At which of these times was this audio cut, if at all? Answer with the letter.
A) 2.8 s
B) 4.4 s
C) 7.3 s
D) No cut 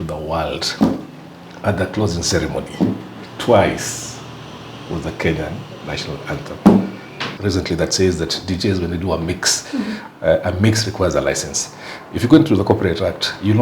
C